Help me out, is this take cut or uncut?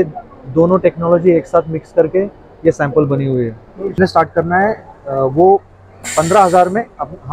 cut